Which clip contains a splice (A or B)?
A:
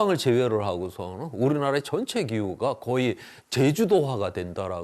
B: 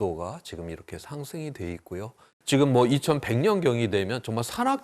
B